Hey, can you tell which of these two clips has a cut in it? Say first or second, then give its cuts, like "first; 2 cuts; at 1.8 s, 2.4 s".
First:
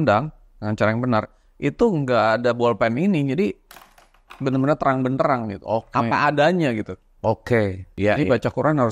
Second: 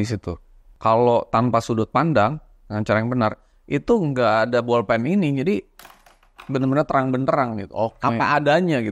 first; 1 cut; at 7.9 s